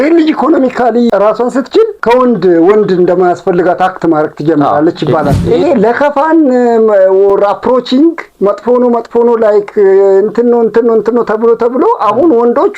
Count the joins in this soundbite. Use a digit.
1